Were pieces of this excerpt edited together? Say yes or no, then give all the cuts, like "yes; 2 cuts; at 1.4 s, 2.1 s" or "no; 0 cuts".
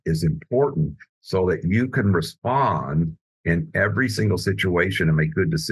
no; 0 cuts